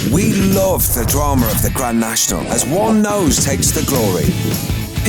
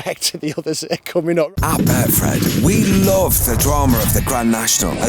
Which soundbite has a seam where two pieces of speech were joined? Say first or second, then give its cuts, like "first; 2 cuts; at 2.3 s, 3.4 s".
second; 1 cut; at 1.5 s